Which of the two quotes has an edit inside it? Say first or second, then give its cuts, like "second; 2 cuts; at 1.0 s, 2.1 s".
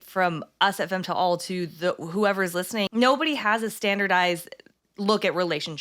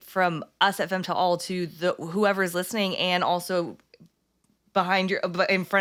first; 1 cut; at 2.9 s